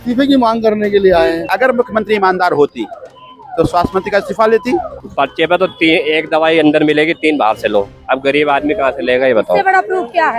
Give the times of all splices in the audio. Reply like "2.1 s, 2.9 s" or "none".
1.5 s, 5.0 s